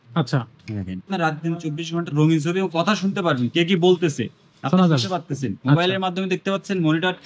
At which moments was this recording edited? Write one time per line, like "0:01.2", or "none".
0:01.1